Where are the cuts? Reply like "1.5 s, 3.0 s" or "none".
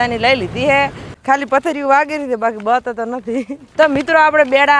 1.1 s, 3.6 s

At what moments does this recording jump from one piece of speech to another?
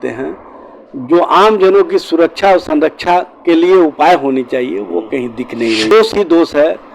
5.9 s

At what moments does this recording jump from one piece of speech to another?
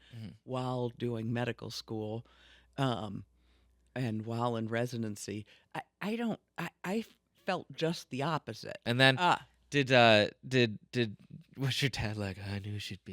8.8 s

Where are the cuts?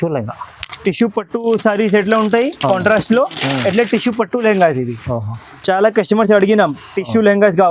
none

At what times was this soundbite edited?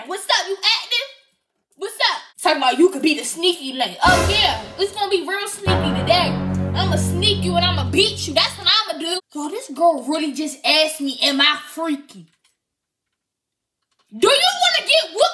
2.3 s, 9.2 s

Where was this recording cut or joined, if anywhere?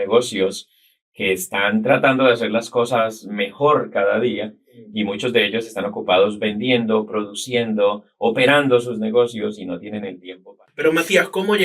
10.2 s

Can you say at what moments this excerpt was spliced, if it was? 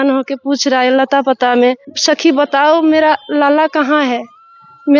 1.9 s

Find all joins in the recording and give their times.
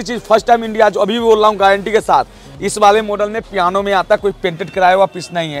none

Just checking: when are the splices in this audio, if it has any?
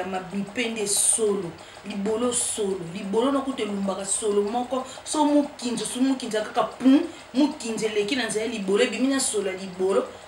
none

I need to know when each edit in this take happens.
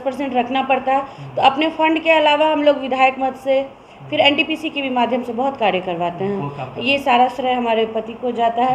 none

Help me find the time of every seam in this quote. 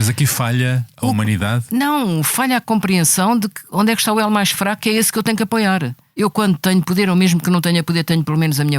1.6 s, 6.0 s

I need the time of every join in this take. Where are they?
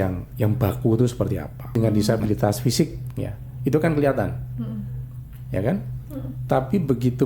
1.7 s

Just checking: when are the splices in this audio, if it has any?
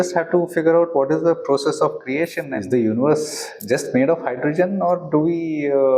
2.4 s

